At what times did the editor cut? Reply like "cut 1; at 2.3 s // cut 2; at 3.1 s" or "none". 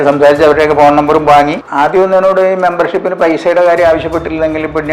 cut 1; at 1.6 s